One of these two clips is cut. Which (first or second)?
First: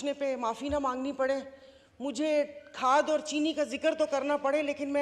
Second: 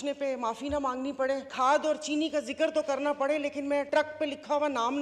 second